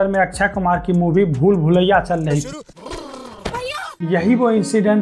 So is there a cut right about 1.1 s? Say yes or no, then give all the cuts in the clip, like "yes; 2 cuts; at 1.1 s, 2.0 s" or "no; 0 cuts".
no; 2 cuts; at 2.7 s, 3.9 s